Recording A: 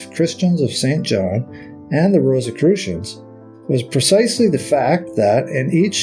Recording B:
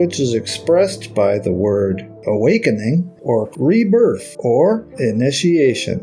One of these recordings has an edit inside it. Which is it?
B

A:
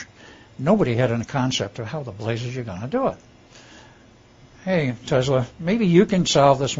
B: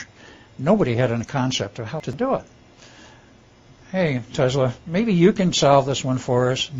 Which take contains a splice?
B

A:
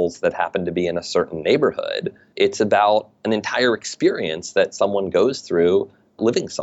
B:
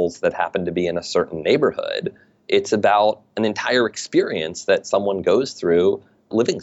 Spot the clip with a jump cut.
A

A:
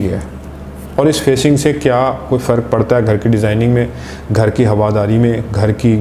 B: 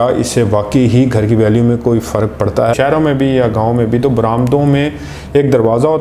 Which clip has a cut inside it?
B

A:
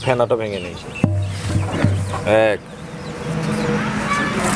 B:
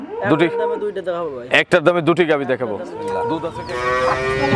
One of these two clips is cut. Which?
B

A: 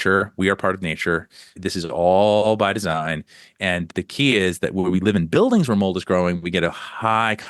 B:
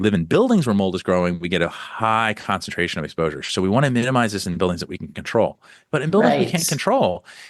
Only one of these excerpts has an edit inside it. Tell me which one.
A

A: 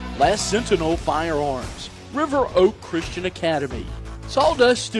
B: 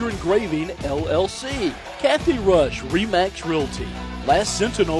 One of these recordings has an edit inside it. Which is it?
B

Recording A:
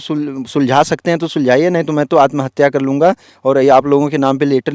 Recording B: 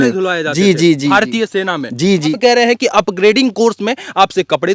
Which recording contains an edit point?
B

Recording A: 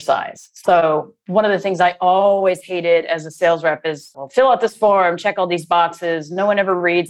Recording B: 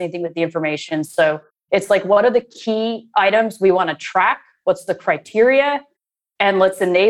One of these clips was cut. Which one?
A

